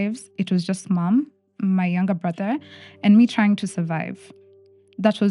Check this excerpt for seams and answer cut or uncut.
uncut